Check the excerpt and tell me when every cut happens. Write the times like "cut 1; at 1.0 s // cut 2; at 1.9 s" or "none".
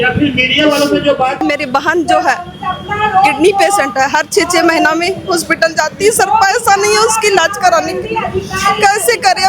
cut 1; at 1.4 s